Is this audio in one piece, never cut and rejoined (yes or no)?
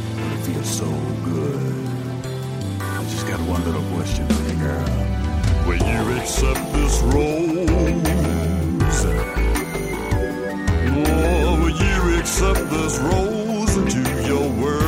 yes